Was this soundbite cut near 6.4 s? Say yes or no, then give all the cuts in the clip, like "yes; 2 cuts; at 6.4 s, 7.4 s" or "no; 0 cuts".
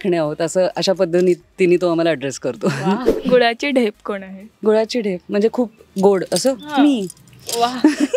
no; 1 cut; at 3.1 s